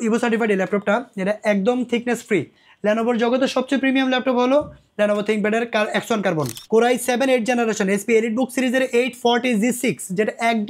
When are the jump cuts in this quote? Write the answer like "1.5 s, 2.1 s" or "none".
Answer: 6.6 s